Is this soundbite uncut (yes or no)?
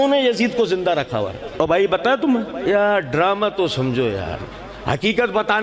no